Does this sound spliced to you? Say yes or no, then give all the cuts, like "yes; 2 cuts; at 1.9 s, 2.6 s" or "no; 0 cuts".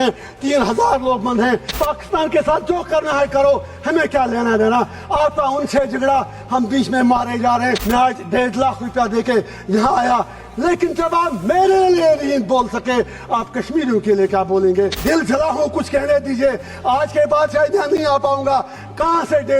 yes; 3 cuts; at 1.7 s, 7.8 s, 15.0 s